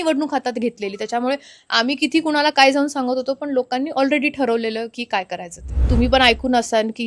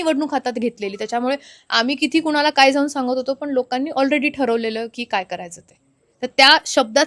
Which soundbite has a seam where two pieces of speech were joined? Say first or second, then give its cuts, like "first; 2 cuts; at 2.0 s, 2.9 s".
first; 1 cut; at 5.7 s